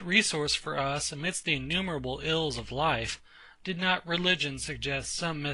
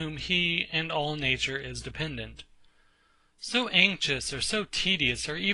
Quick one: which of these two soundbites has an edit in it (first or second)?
second